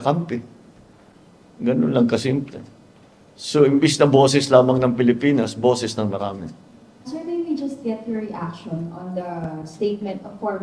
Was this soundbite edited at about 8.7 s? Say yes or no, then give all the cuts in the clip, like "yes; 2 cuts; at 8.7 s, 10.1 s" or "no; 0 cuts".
no; 1 cut; at 7.1 s